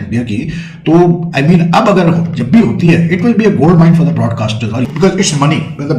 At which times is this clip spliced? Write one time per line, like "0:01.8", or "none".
0:04.8

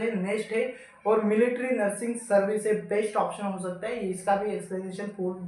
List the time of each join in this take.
none

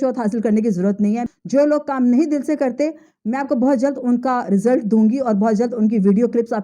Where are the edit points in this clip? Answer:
0:01.2

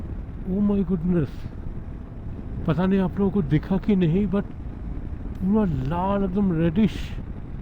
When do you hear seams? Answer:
none

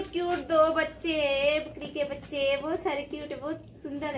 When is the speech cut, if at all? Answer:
none

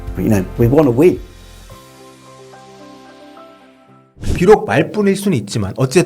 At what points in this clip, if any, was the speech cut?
0:04.4

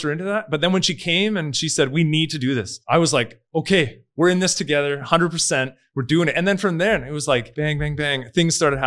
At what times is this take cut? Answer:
0:02.7
0:07.5

